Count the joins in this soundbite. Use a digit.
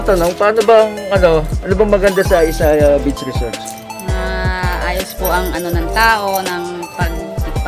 0